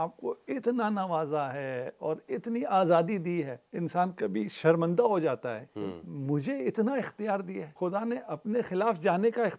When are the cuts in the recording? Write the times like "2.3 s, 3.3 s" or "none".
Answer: 3.6 s, 7.7 s